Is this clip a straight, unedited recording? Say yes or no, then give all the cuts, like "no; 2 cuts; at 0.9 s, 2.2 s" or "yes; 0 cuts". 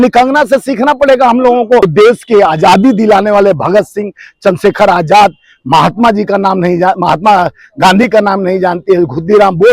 no; 1 cut; at 1.8 s